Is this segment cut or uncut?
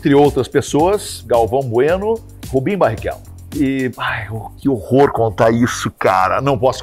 cut